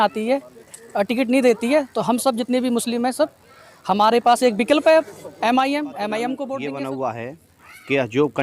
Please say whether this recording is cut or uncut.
cut